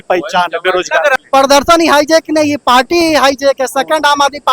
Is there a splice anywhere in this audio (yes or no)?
yes